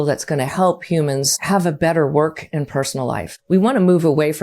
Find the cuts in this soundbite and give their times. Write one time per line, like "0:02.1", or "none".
0:01.4
0:03.3